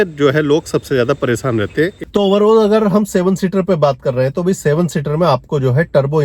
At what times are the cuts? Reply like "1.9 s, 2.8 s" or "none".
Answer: 1.9 s